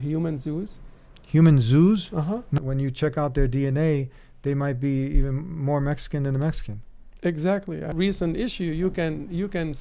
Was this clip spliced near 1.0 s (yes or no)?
no